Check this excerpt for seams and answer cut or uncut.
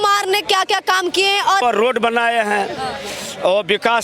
cut